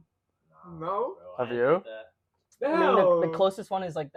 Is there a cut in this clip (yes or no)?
no